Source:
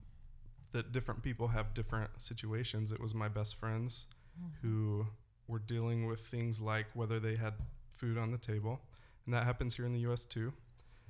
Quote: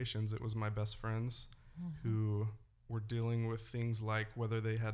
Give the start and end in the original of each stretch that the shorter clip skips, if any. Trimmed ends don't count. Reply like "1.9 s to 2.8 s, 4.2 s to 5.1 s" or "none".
none